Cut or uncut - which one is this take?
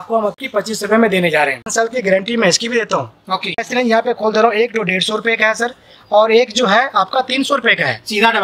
cut